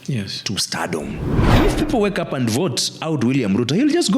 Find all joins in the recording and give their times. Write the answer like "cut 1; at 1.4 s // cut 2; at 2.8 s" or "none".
cut 1; at 1.4 s